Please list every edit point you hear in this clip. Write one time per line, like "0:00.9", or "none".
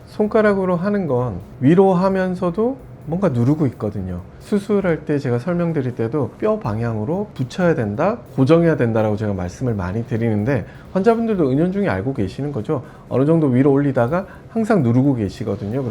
0:01.4
0:04.4
0:06.3
0:07.3